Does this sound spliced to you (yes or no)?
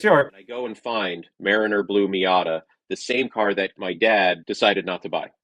no